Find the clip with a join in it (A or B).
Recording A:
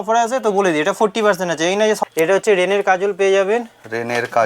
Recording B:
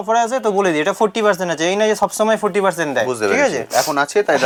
A